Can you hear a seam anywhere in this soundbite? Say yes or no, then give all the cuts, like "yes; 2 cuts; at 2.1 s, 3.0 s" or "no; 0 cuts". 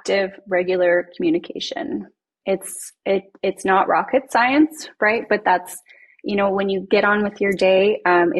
no; 0 cuts